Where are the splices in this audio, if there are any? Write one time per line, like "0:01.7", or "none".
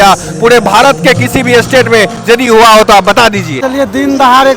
0:03.5